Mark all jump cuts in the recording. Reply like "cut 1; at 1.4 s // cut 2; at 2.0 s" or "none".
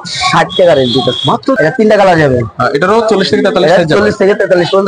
cut 1; at 1.6 s